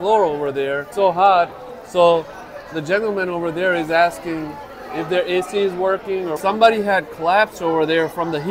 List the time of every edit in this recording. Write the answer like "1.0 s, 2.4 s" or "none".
0.9 s, 6.4 s